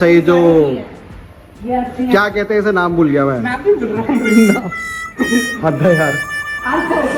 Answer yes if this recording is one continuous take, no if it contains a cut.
yes